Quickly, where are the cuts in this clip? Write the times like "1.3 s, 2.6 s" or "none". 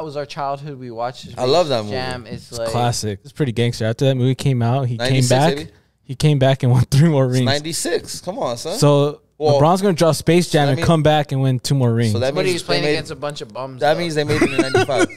3.3 s